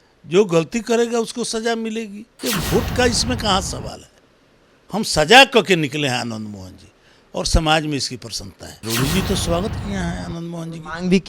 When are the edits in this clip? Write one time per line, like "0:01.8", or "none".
0:02.3
0:08.8